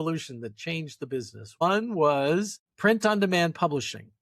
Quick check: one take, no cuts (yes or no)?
no